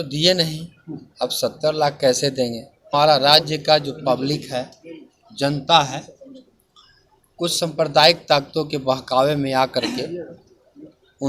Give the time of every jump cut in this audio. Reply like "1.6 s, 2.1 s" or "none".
2.9 s